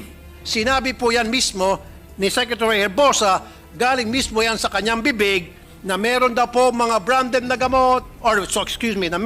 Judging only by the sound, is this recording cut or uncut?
uncut